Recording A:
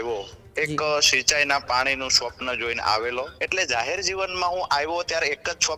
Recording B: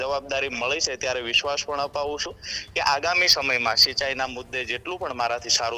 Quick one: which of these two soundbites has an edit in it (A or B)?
A